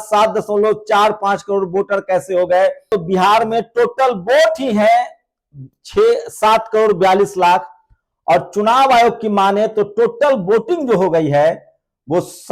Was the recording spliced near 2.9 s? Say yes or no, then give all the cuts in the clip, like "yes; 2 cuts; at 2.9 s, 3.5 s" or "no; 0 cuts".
yes; 1 cut; at 2.9 s